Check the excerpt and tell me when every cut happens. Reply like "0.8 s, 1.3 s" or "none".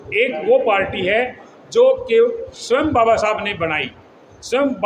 none